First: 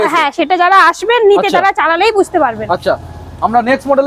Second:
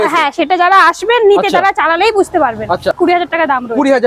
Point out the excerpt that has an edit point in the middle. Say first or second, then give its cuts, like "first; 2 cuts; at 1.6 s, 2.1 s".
second; 1 cut; at 3.0 s